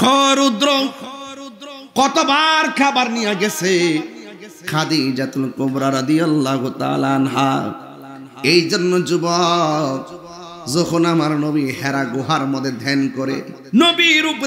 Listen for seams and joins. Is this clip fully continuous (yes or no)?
no